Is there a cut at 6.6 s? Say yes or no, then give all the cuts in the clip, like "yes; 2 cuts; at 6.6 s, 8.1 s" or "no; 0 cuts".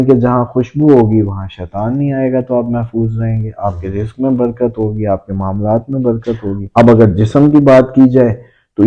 yes; 1 cut; at 6.6 s